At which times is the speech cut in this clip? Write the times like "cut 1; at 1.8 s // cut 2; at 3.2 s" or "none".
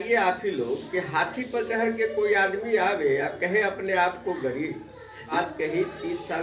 cut 1; at 5.3 s

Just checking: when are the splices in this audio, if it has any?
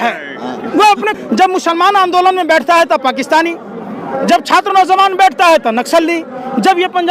cut 1; at 1.1 s

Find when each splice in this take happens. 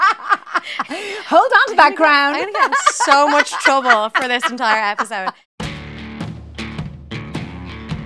cut 1; at 5.5 s

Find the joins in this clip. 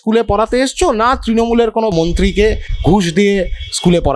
cut 1; at 1.9 s

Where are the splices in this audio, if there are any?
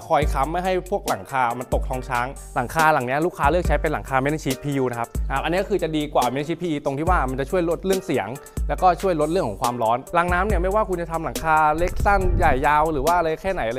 cut 1; at 2.4 s // cut 2; at 5.2 s // cut 3; at 10.0 s

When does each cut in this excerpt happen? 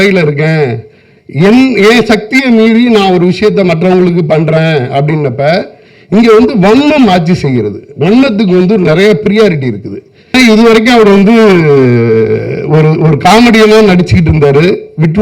cut 1; at 10.3 s

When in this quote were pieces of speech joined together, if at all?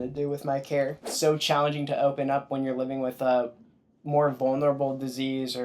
cut 1; at 1.0 s

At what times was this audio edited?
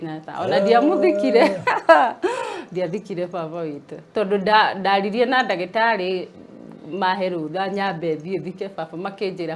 none

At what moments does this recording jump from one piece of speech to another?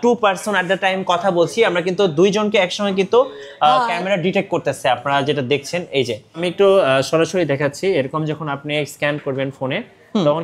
cut 1; at 6.4 s

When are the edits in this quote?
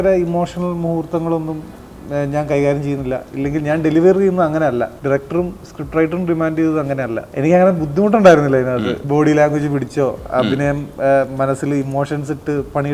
cut 1; at 4.9 s // cut 2; at 7.2 s // cut 3; at 9.0 s

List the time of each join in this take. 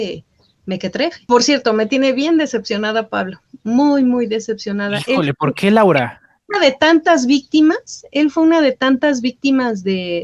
cut 1; at 1.2 s

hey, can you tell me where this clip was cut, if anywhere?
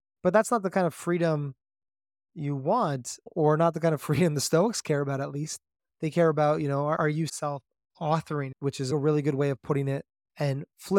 cut 1; at 3.2 s // cut 2; at 7.0 s // cut 3; at 8.9 s

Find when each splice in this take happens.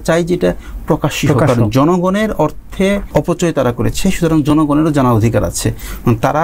cut 1; at 3.0 s

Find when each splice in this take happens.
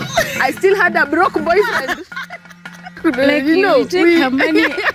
cut 1; at 2.9 s

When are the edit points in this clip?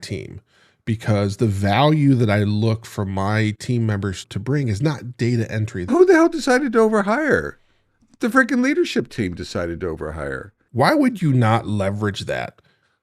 cut 1; at 4.2 s // cut 2; at 5.9 s // cut 3; at 10.6 s

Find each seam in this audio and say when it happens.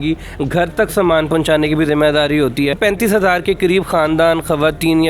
cut 1; at 2.8 s

